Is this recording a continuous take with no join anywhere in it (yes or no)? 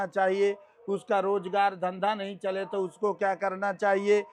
yes